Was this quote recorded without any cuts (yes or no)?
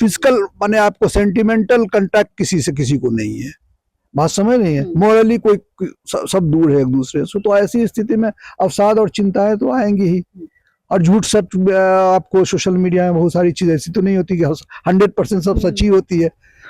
yes